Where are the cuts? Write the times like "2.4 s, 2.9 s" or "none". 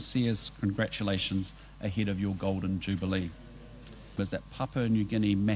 4.2 s